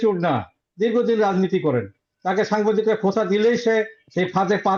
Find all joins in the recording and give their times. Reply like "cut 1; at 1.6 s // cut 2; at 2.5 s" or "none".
none